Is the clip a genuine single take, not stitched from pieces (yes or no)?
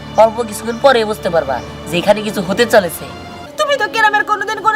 no